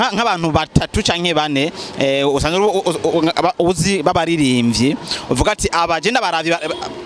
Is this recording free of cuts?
yes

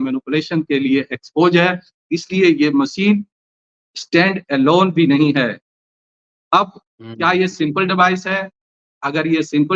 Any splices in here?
no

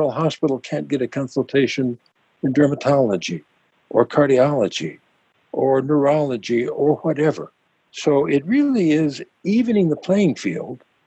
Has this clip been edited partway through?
no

